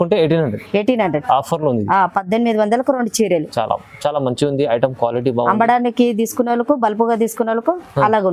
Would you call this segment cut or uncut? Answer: uncut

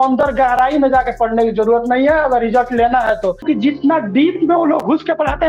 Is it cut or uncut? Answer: cut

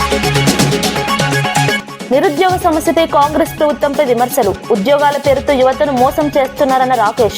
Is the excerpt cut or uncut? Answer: cut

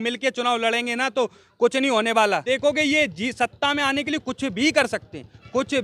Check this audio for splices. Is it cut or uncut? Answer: cut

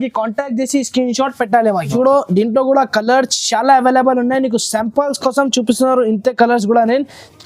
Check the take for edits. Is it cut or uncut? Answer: cut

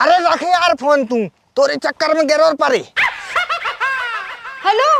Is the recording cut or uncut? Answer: uncut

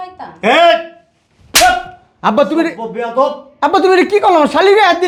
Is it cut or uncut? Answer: uncut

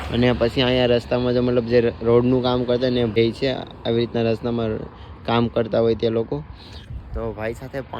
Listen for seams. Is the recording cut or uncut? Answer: cut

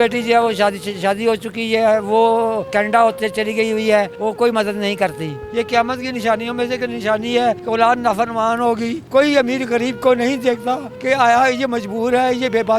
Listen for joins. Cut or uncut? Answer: cut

